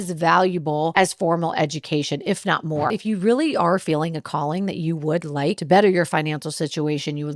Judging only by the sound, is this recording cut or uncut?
cut